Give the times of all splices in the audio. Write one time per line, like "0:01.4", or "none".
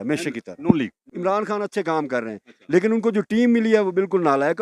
0:01.1